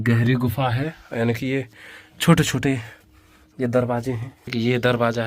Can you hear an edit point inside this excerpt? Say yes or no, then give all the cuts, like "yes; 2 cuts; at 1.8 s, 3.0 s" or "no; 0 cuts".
yes; 1 cut; at 4.3 s